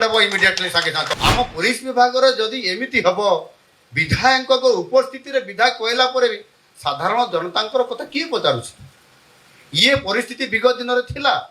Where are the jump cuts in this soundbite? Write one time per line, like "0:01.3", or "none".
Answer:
0:01.1